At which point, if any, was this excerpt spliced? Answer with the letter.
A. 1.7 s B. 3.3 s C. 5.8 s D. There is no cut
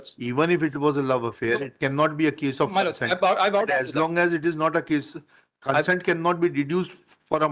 B